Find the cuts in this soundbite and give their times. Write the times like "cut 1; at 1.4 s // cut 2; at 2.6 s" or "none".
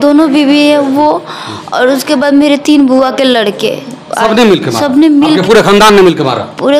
none